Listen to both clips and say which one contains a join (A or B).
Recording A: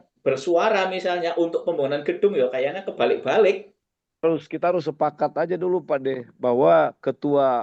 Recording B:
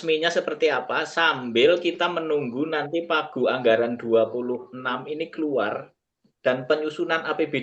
A